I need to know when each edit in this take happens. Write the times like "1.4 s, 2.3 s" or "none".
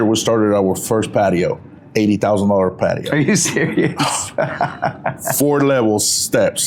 none